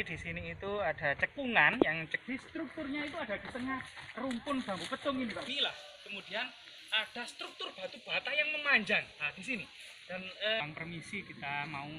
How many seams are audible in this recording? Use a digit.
3